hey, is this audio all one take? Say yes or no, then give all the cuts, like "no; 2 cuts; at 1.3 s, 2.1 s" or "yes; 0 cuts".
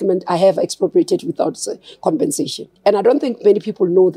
no; 1 cut; at 2.6 s